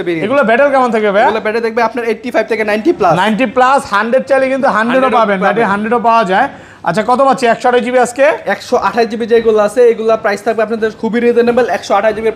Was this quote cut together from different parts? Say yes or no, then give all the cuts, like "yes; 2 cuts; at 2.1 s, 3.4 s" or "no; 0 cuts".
no; 0 cuts